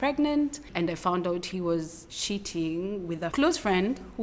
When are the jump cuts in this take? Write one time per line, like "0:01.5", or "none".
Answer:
0:03.3